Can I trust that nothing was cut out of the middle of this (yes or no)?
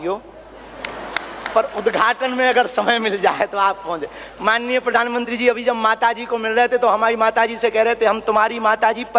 yes